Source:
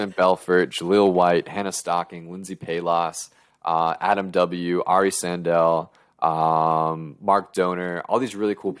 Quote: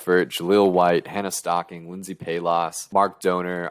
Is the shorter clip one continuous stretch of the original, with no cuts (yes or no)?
no